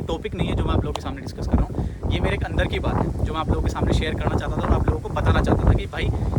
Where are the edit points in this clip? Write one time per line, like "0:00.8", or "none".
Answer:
none